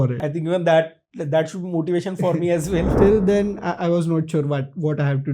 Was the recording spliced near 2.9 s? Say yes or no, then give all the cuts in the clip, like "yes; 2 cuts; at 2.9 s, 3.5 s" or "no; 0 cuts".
yes; 1 cut; at 2.9 s